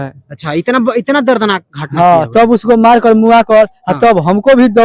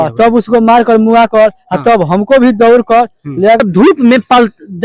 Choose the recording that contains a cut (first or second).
second